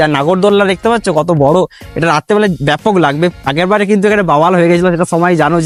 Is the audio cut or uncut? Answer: uncut